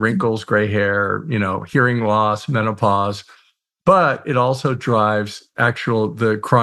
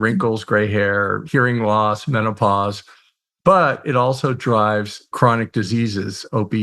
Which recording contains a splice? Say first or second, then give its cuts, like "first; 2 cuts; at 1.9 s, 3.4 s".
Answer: second; 2 cuts; at 1.2 s, 5.1 s